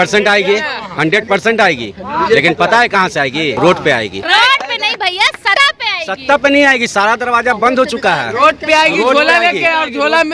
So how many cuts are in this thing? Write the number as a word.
three